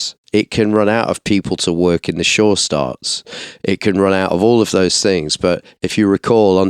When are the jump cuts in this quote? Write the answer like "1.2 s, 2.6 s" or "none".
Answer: none